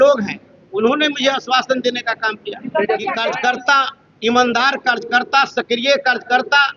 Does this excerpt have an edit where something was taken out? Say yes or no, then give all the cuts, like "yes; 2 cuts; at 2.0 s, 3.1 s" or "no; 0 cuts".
yes; 1 cut; at 3.3 s